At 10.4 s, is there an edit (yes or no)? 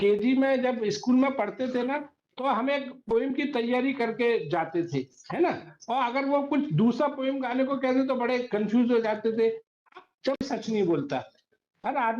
yes